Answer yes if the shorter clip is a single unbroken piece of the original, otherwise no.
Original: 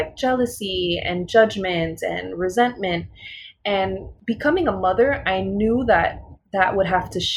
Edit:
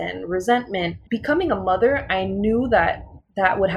no